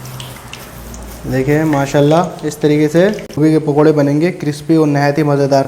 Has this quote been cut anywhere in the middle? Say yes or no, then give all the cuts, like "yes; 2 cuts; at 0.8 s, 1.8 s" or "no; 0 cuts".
yes; 1 cut; at 3.4 s